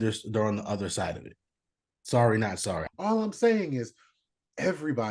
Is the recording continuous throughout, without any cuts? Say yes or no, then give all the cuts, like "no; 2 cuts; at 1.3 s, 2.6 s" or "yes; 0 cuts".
no; 1 cut; at 2.8 s